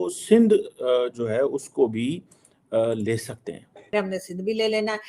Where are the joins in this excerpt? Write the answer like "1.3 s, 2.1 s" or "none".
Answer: 3.9 s